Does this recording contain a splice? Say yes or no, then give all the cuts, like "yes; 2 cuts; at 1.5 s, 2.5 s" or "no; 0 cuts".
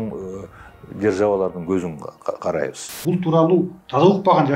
yes; 1 cut; at 2.9 s